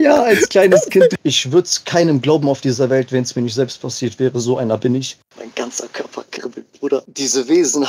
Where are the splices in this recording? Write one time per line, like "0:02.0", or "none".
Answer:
0:01.2
0:05.2
0:07.1